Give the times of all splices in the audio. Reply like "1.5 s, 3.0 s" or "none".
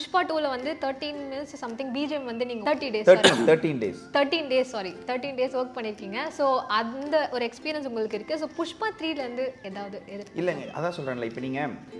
2.6 s